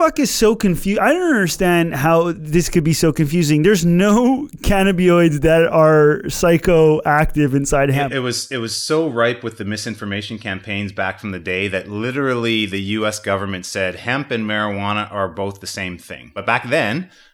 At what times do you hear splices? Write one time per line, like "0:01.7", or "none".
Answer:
0:08.0
0:16.4